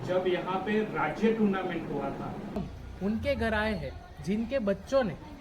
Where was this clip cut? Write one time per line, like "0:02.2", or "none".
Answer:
0:02.6